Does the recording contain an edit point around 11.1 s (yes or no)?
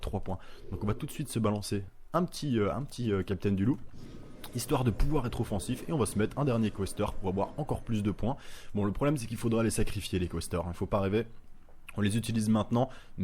no